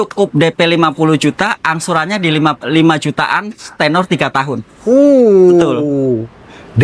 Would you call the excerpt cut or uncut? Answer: uncut